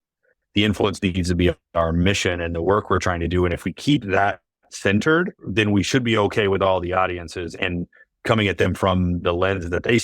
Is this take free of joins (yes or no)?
no